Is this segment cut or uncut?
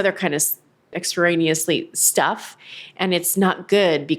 cut